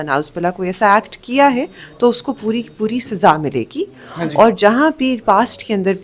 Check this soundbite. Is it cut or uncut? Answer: uncut